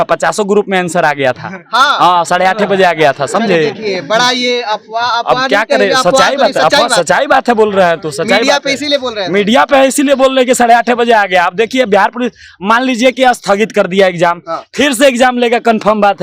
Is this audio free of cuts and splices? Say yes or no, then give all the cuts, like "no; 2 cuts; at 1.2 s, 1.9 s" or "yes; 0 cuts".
yes; 0 cuts